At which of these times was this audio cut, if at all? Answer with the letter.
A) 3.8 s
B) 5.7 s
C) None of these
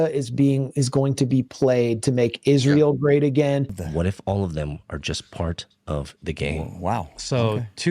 A